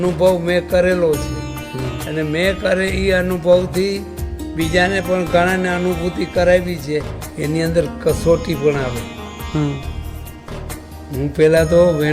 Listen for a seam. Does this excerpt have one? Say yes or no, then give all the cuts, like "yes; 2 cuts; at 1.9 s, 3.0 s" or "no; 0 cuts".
yes; 1 cut; at 7.5 s